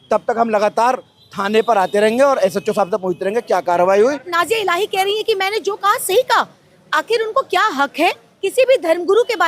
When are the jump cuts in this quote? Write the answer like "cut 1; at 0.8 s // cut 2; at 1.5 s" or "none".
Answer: cut 1; at 4.2 s